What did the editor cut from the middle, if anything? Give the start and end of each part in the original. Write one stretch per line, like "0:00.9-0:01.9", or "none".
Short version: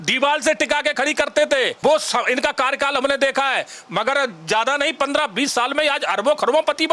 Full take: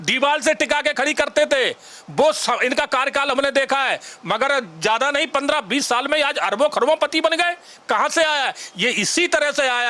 0:01.7-0:02.1